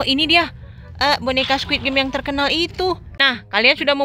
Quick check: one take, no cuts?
no; 1 cut; at 3.1 s

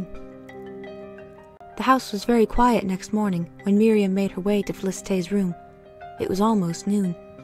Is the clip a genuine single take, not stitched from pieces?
yes; 0 cuts

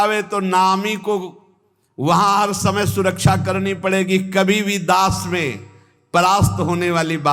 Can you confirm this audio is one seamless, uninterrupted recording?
yes; 0 cuts

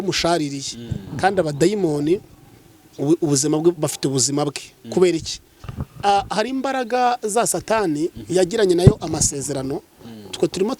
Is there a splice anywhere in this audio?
no; 0 cuts

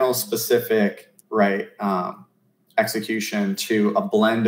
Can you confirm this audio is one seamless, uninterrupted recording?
yes; 0 cuts

